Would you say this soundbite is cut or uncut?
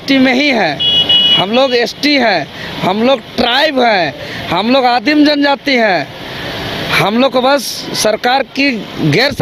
uncut